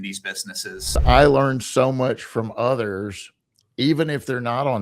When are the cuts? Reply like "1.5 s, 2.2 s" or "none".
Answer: 1.0 s